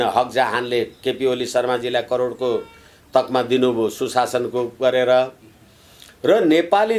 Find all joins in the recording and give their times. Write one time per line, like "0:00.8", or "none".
none